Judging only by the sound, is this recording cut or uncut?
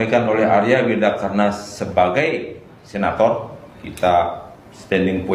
uncut